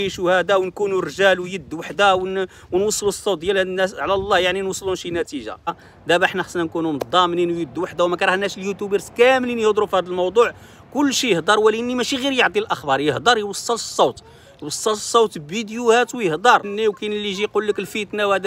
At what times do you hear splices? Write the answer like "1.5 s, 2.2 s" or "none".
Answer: 5.9 s, 16.7 s